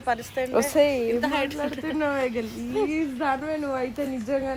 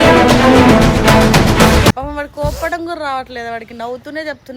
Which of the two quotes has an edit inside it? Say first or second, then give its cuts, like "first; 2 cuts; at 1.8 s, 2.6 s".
second; 1 cut; at 2.0 s